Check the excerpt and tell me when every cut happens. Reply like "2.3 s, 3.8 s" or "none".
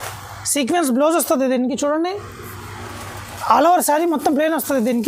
none